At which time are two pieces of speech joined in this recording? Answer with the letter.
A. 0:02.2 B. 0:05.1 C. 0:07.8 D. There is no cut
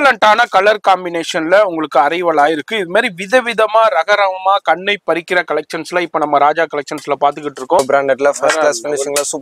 C